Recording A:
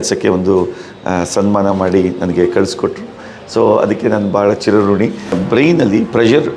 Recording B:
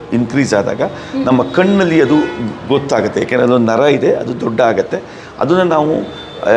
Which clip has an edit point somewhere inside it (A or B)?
A